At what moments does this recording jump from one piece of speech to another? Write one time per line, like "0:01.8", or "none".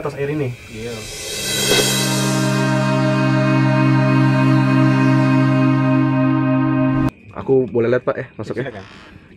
0:07.1